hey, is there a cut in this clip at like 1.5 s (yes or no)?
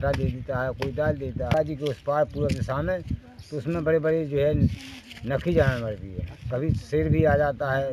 yes